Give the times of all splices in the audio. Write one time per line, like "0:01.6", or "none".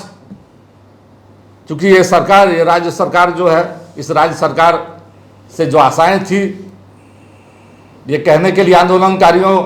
none